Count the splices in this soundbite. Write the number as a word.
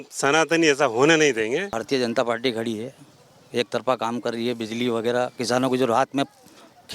one